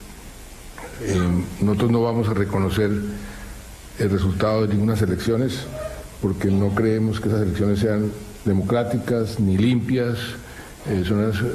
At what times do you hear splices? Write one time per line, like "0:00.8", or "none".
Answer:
0:09.1